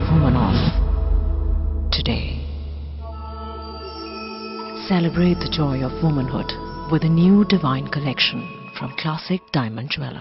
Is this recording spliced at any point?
no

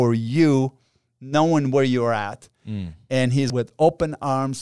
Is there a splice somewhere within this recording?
yes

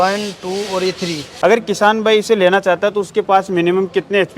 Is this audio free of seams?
no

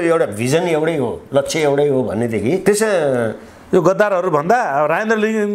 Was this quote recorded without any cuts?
no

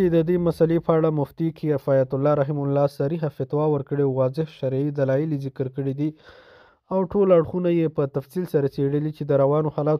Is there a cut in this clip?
no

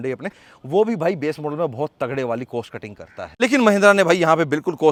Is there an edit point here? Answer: no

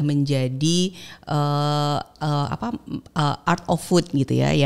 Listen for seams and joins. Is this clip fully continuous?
yes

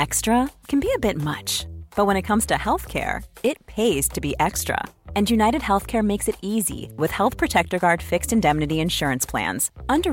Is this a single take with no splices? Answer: yes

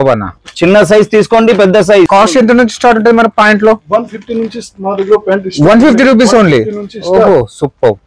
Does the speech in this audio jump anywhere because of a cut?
yes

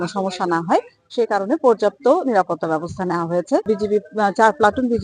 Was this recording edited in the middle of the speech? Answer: no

